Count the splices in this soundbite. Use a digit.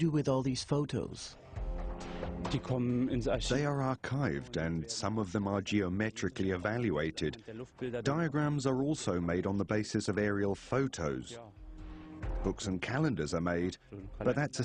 0